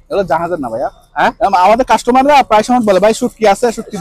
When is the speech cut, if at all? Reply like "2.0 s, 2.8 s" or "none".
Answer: none